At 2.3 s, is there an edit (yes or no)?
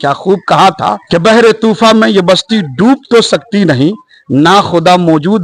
no